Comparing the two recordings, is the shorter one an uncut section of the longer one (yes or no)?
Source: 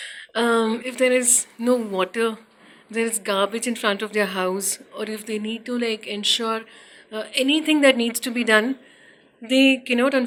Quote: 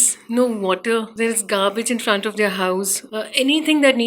no